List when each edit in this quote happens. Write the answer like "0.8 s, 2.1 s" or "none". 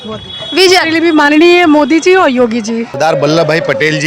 2.9 s